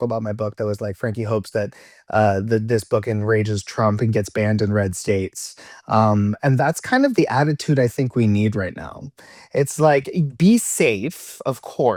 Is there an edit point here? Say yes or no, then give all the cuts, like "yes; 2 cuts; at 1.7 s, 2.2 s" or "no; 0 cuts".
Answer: no; 0 cuts